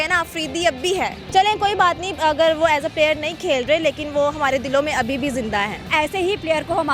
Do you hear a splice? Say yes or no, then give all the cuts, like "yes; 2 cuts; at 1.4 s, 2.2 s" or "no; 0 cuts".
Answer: no; 0 cuts